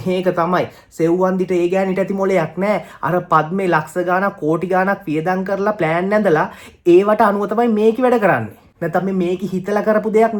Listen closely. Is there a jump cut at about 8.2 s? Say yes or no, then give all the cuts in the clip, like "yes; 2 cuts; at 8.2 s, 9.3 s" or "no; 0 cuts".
no; 0 cuts